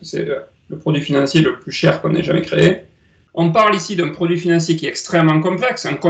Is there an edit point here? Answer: yes; 1 cut; at 3.2 s

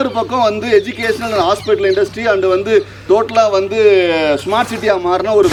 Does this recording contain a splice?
no; 0 cuts

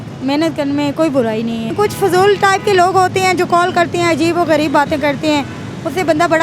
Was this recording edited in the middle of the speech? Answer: yes; 1 cut; at 1.7 s

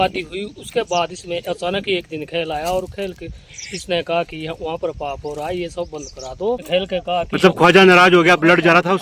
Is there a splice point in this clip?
yes; 1 cut; at 6.6 s

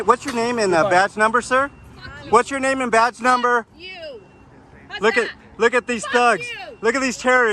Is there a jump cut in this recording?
no; 0 cuts

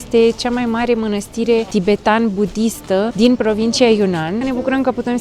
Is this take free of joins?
no; 3 cuts; at 1.7 s, 3.1 s, 4.4 s

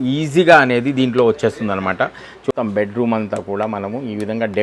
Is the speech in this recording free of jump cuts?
no; 1 cut; at 2.5 s

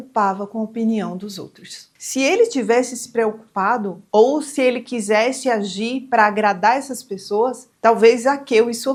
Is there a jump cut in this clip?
no; 0 cuts

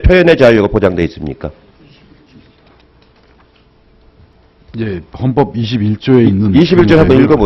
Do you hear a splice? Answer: no; 0 cuts

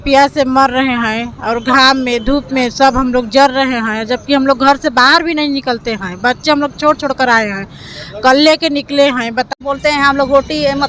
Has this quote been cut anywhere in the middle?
yes; 1 cut; at 9.5 s

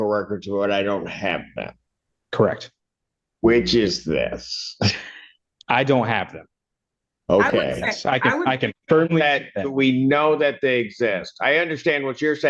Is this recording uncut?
yes; 0 cuts

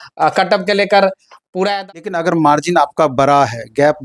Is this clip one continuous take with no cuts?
no; 1 cut; at 1.8 s

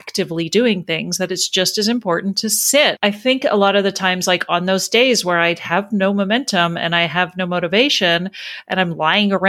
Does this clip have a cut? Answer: yes; 1 cut; at 3.0 s

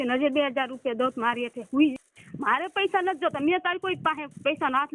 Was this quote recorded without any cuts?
no; 1 cut; at 2.2 s

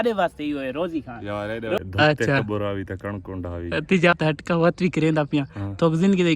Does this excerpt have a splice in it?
yes; 2 cuts; at 1.8 s, 4.1 s

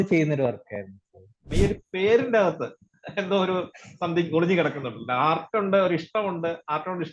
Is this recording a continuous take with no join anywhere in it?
no; 1 cut; at 1.4 s

